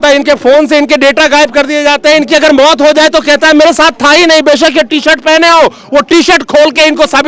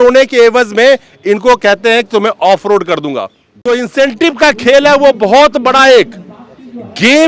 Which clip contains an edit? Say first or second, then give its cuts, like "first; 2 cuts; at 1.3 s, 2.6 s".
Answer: second; 1 cut; at 3.6 s